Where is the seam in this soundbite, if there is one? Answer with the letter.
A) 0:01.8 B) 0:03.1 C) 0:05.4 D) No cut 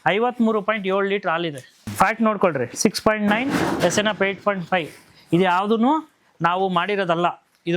A